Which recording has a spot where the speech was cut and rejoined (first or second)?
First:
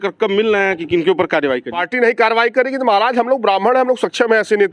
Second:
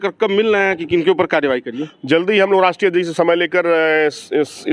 first